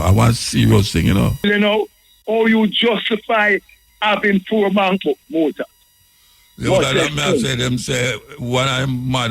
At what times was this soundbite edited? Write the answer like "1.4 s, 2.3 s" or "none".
1.4 s